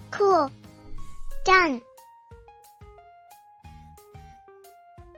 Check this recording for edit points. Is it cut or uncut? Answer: uncut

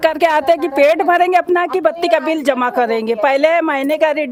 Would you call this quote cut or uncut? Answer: uncut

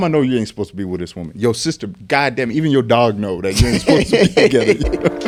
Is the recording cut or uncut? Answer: uncut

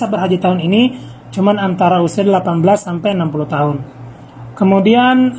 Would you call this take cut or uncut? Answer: uncut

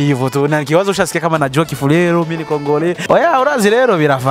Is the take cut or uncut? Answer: cut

